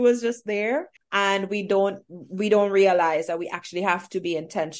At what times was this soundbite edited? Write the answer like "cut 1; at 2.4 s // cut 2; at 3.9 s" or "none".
cut 1; at 1.0 s